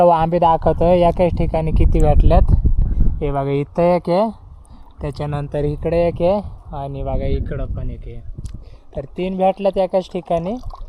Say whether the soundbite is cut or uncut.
uncut